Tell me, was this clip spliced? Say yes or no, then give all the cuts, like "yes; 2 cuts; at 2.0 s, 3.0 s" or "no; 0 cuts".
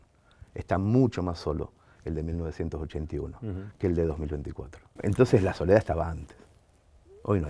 yes; 1 cut; at 4.8 s